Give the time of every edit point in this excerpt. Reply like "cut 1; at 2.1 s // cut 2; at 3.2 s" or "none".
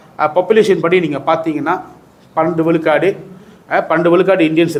none